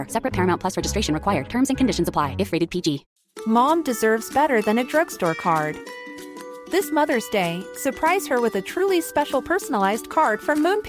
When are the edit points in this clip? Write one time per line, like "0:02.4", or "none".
0:03.1